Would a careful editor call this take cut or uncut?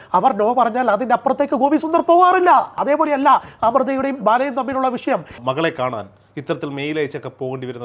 cut